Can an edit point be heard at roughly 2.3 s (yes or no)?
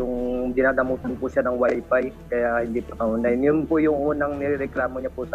no